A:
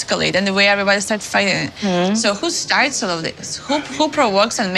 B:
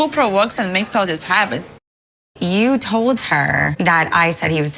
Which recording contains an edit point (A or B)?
B